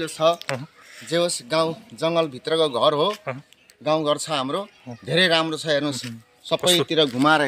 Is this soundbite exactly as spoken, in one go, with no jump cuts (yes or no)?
yes